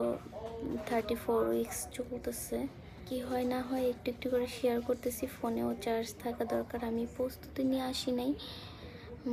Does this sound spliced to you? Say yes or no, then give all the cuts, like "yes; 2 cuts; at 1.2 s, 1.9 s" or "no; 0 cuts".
yes; 1 cut; at 3.0 s